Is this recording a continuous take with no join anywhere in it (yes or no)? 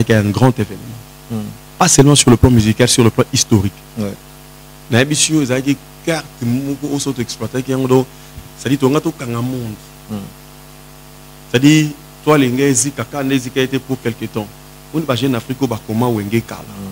yes